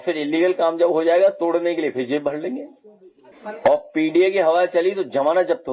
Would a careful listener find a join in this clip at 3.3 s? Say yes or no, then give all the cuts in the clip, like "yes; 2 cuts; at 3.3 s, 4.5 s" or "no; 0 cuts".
yes; 1 cut; at 3.3 s